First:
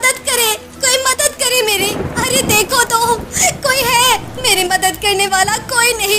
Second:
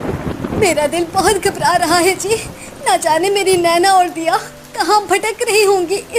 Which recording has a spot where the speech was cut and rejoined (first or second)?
first